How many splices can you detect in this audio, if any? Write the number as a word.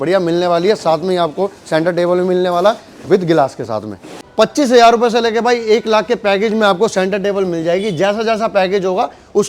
one